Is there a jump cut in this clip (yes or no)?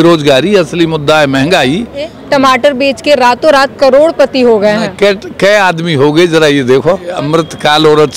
yes